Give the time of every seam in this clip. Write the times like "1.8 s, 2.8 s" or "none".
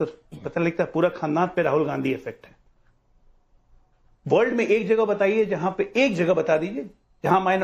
4.0 s